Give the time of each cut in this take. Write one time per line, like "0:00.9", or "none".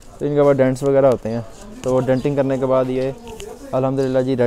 none